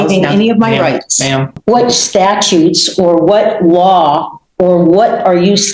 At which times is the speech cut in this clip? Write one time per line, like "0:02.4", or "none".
0:01.5